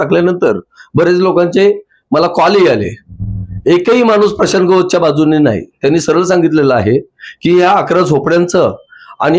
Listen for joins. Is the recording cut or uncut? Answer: uncut